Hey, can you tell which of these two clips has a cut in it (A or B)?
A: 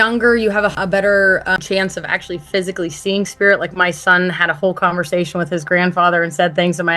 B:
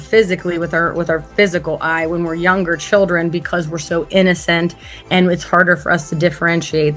A